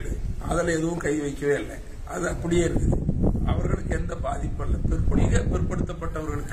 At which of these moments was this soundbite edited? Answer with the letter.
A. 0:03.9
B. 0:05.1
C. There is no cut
B